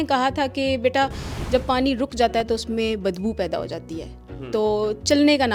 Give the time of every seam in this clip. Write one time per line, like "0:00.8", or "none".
none